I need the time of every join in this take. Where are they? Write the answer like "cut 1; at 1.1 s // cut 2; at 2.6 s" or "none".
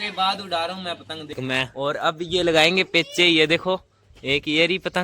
cut 1; at 1.4 s

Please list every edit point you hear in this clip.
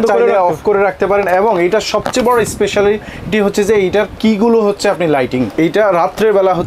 none

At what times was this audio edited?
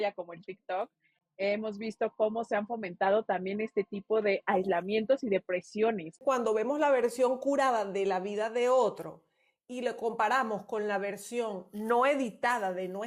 cut 1; at 6.2 s

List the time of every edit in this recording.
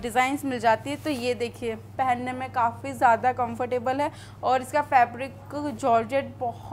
cut 1; at 1.9 s

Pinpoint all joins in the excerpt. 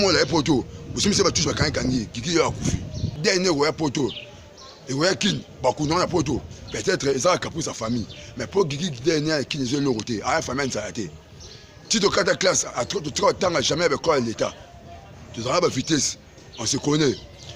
cut 1; at 3.1 s

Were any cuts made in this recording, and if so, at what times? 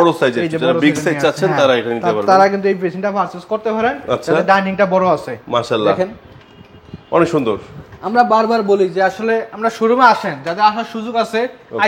none

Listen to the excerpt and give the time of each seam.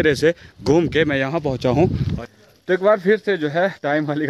cut 1; at 2.1 s

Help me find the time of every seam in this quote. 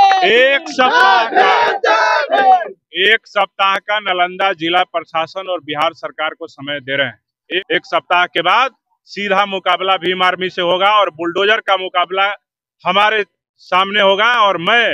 cut 1; at 7.6 s

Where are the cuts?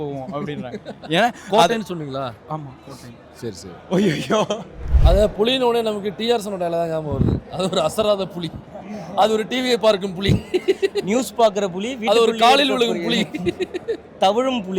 cut 1; at 5.0 s

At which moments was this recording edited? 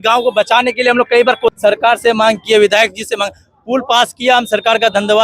cut 1; at 1.5 s

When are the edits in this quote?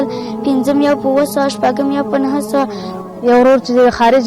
cut 1; at 2.8 s

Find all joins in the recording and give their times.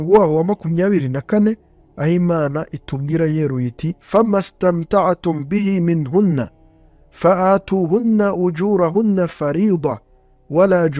none

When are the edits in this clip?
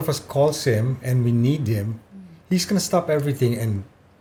none

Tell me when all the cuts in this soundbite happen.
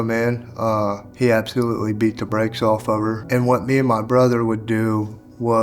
cut 1; at 1.1 s // cut 2; at 3.2 s

